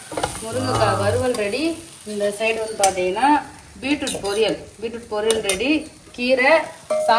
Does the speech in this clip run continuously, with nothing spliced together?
yes; 0 cuts

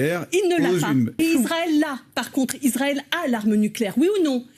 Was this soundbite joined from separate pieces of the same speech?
yes; 1 cut; at 1.2 s

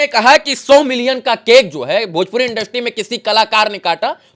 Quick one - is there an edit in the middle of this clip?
no; 0 cuts

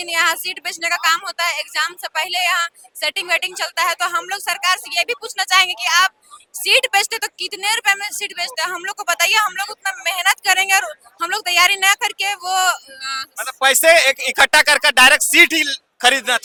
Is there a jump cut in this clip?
no; 0 cuts

